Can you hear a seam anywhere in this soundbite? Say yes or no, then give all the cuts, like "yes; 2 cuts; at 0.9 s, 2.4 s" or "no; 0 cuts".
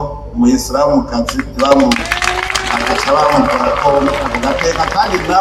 no; 0 cuts